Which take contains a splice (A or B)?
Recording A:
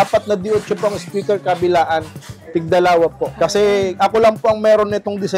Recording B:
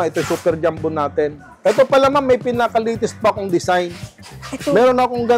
A